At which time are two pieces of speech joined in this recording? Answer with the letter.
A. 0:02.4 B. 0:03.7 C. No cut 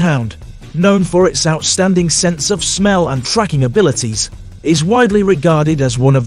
C